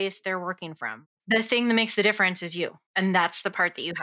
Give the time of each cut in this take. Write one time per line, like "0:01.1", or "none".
0:01.1